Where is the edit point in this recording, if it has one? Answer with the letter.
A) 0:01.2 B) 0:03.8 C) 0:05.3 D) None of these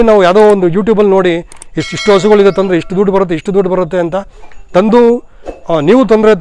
D